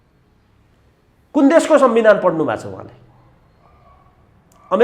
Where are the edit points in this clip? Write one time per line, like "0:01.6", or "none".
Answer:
none